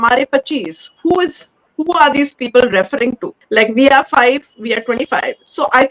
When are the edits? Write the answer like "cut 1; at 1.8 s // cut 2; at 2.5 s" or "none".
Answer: cut 1; at 3.3 s